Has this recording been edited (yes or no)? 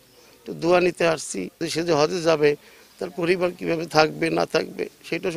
yes